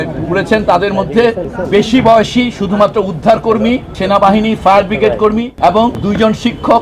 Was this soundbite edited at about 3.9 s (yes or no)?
yes